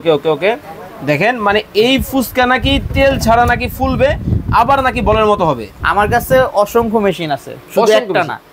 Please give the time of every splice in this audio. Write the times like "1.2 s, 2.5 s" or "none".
5.7 s